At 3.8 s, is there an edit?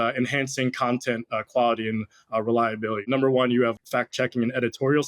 yes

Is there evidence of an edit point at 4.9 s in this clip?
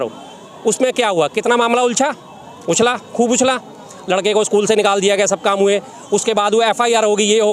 no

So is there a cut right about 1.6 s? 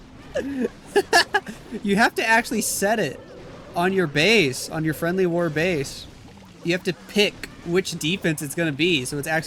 no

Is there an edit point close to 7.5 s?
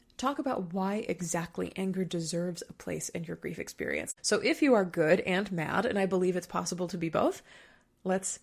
no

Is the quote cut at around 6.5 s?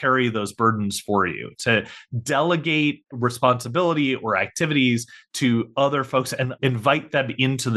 yes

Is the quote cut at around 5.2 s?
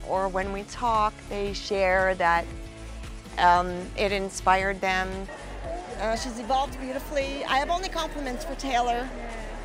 no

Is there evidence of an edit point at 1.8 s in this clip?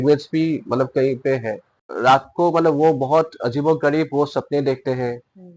yes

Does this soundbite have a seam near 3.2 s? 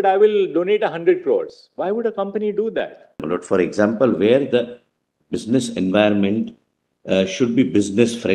yes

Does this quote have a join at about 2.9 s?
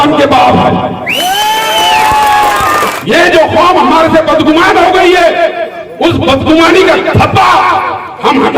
yes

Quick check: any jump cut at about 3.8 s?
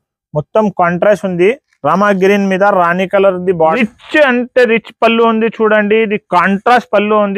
yes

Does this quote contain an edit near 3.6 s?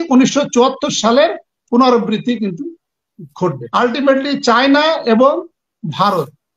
yes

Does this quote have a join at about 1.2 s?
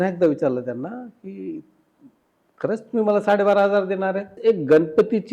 no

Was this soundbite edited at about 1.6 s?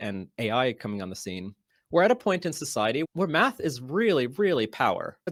no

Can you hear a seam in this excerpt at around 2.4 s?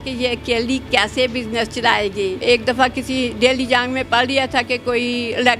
yes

